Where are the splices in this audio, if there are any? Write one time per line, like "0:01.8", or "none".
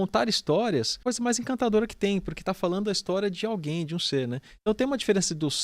0:00.9